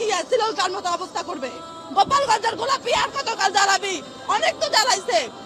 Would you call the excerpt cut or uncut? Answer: uncut